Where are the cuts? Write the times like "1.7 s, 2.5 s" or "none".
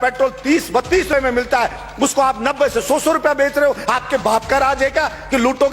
1.1 s